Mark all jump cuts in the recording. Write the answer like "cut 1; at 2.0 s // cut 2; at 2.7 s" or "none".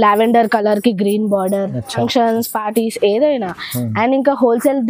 cut 1; at 2.0 s